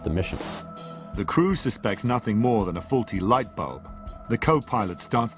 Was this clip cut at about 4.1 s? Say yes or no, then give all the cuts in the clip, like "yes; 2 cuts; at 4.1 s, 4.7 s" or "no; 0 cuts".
no; 1 cut; at 1.7 s